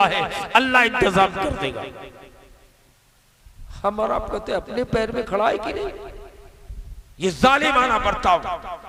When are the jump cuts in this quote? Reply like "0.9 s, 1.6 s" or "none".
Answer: none